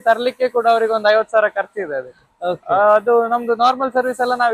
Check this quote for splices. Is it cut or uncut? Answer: uncut